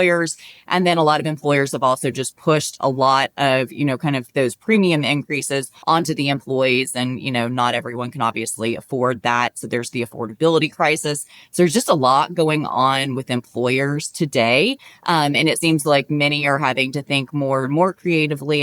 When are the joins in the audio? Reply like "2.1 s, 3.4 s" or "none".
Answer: none